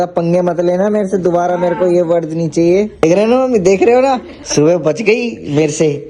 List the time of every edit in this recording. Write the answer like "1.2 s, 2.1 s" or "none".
3.0 s, 4.3 s